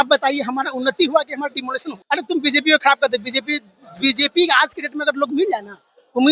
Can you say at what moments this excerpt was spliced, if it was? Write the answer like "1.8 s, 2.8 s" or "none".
1.9 s